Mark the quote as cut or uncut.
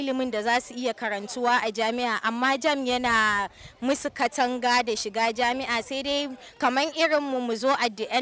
uncut